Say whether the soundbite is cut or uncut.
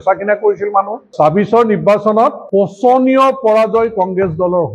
cut